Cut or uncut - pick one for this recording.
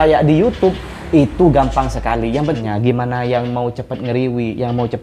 cut